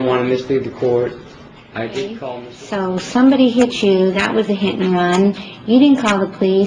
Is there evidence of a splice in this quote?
yes; 1 cut; at 2.4 s

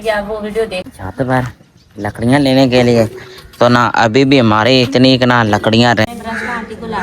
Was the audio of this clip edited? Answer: yes; 2 cuts; at 0.9 s, 6.1 s

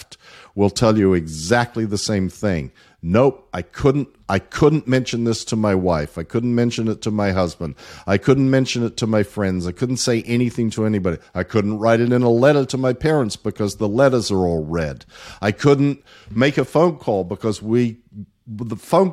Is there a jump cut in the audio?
no; 0 cuts

